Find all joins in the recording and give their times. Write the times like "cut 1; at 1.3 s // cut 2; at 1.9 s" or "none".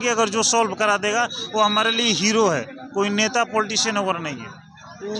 none

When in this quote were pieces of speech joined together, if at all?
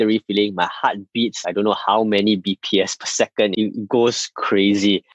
cut 1; at 3.5 s

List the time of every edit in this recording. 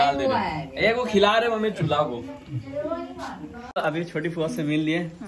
cut 1; at 3.8 s

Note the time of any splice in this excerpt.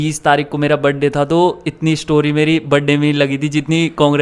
none

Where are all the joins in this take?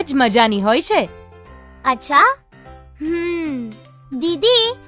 none

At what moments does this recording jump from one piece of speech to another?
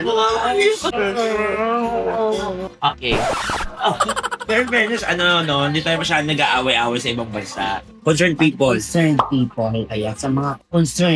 cut 1; at 8.0 s

